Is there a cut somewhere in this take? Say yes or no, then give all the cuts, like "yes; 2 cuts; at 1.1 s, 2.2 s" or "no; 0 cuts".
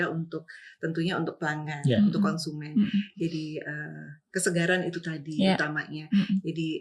no; 0 cuts